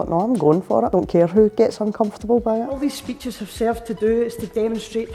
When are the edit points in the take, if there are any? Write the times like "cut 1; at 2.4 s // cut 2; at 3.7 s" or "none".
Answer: cut 1; at 0.9 s // cut 2; at 2.8 s